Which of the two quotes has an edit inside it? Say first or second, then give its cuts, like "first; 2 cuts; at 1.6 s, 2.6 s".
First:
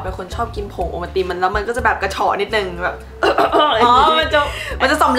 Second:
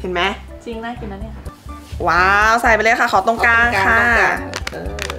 second; 1 cut; at 1.4 s